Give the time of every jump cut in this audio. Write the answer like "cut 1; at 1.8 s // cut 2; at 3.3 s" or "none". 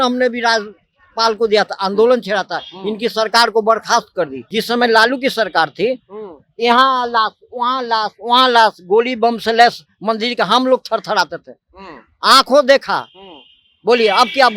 cut 1; at 4.4 s

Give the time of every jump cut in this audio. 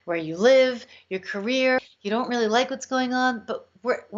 cut 1; at 1.9 s

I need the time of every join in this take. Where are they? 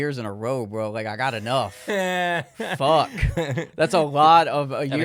none

